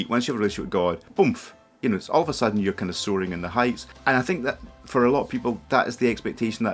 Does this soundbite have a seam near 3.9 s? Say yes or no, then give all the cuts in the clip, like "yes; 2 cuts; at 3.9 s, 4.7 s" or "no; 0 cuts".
yes; 2 cuts; at 3.9 s, 5.6 s